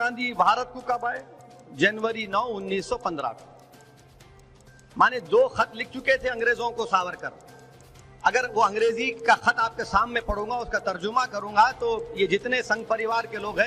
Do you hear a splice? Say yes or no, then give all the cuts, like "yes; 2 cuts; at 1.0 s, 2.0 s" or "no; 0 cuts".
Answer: no; 0 cuts